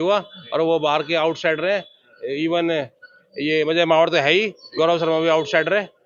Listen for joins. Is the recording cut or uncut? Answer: uncut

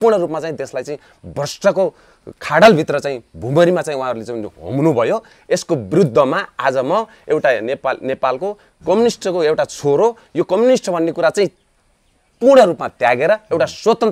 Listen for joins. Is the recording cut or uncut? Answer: uncut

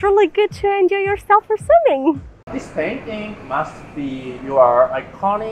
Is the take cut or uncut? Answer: cut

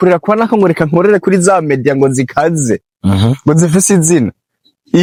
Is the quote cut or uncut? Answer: uncut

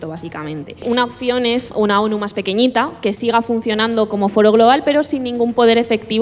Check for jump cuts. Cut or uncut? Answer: cut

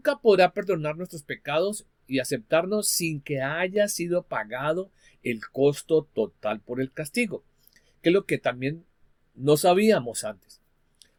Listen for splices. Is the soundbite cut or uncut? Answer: uncut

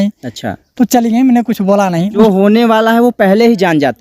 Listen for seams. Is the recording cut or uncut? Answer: cut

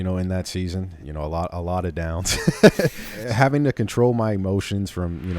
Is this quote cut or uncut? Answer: cut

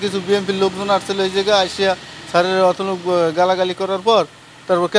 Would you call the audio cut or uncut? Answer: uncut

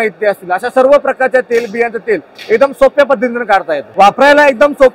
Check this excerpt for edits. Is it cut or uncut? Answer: cut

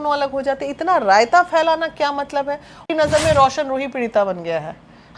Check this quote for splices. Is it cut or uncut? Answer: cut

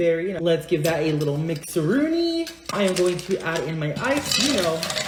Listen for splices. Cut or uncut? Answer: uncut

